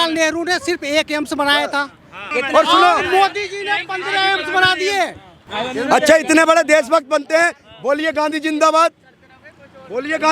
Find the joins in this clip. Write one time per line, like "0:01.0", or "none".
0:02.2
0:05.4